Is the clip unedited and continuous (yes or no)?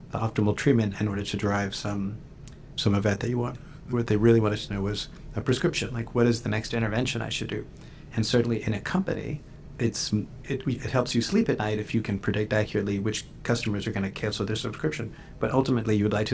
no